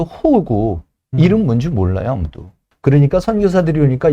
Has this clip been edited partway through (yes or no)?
yes